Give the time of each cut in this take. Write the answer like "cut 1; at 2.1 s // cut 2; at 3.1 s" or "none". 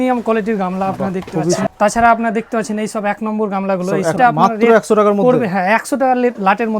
cut 1; at 1.7 s // cut 2; at 4.1 s